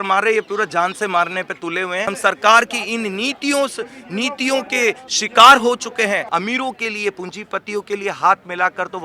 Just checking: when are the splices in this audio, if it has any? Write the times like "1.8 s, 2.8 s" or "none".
2.1 s, 6.2 s